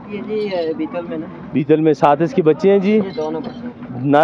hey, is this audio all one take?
yes; 0 cuts

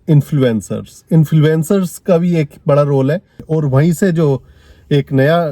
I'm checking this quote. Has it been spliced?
yes; 1 cut; at 3.4 s

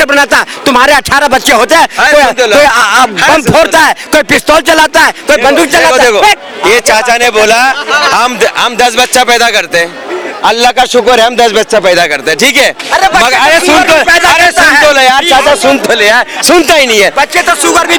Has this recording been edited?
no; 0 cuts

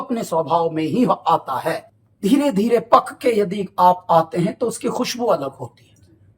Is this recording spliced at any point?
yes; 1 cut; at 1.9 s

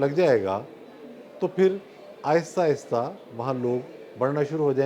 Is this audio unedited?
yes; 0 cuts

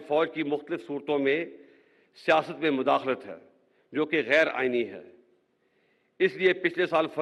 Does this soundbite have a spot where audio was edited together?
no; 0 cuts

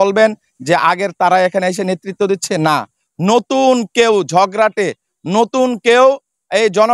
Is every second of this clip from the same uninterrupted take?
yes; 0 cuts

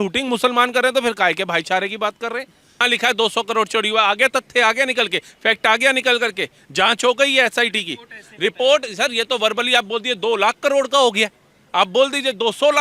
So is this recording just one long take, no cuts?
no; 1 cut; at 2.8 s

